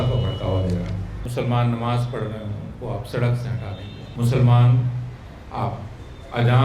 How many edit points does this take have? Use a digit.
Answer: 2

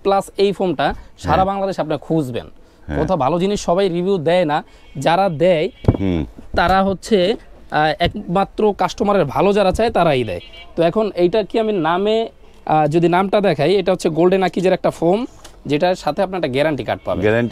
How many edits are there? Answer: 0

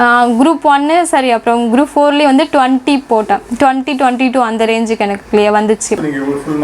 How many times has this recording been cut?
0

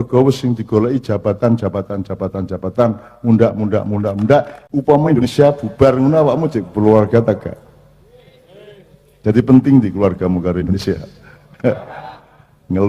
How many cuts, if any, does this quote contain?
1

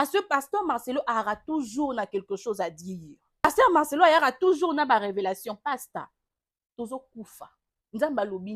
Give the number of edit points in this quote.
1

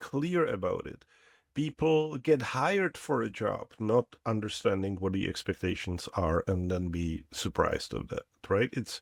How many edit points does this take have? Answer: 0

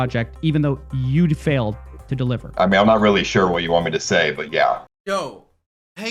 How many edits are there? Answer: 2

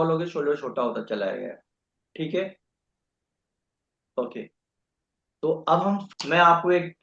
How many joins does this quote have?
1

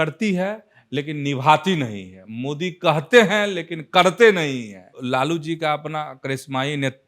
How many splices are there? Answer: 1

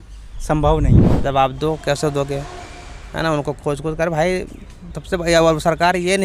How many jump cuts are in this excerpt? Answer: 1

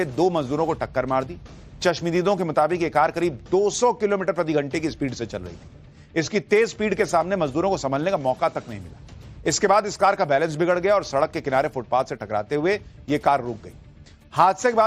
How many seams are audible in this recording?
1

